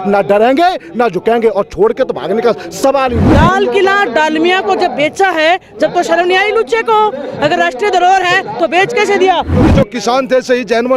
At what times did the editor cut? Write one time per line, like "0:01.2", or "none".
0:03.3
0:09.7